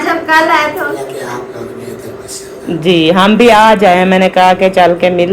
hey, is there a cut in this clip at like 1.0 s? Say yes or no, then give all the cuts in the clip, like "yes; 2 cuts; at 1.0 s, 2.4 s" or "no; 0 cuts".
yes; 1 cut; at 1.0 s